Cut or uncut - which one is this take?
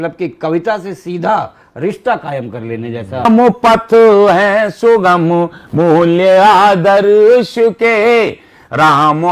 cut